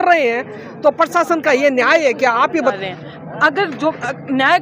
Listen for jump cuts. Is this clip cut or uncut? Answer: cut